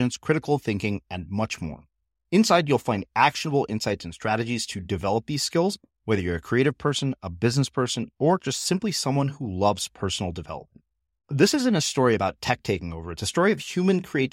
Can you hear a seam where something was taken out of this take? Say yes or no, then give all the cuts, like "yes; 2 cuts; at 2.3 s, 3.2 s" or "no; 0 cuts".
no; 0 cuts